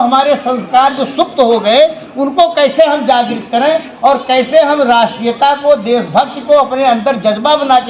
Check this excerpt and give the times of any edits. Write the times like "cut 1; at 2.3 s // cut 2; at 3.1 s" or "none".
none